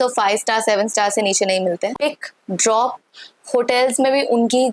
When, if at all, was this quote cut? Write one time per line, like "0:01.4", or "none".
0:01.9